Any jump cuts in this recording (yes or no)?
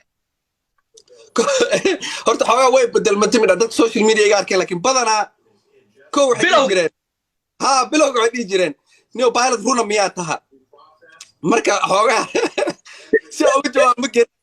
no